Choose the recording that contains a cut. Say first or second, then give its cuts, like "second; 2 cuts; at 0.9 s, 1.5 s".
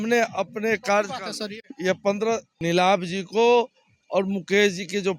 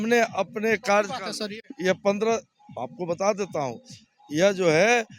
first; 1 cut; at 2.5 s